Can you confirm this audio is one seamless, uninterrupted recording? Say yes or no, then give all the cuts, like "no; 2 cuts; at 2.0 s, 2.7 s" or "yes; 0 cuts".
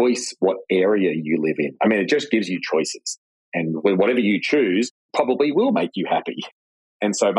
yes; 0 cuts